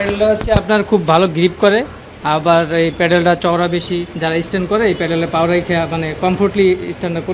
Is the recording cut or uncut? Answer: uncut